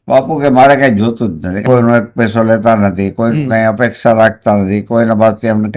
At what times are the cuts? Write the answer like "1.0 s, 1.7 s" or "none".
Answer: 1.5 s